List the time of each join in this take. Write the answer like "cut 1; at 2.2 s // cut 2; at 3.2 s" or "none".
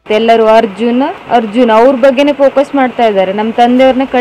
cut 1; at 1.2 s